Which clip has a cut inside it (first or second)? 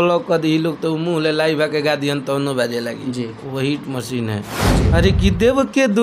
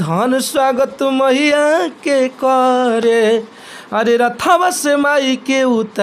first